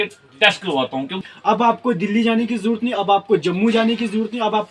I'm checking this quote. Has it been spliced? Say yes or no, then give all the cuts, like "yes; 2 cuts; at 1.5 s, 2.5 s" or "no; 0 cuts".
yes; 1 cut; at 1.3 s